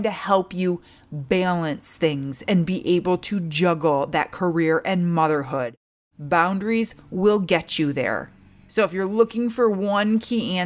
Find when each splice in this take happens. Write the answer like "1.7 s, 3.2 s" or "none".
none